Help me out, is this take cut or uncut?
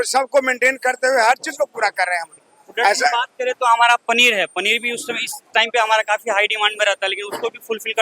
uncut